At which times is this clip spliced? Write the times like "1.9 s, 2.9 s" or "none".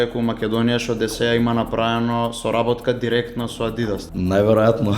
4.0 s